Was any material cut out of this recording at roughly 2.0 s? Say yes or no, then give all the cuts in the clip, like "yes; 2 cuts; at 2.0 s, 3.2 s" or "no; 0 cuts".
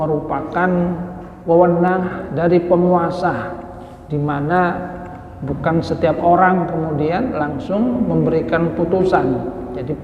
yes; 1 cut; at 2.0 s